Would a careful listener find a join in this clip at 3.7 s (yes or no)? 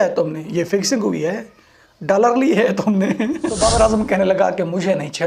yes